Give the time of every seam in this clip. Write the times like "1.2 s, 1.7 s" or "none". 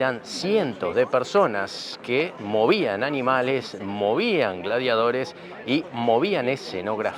none